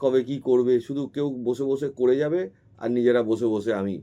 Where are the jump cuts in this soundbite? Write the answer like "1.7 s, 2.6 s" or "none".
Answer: none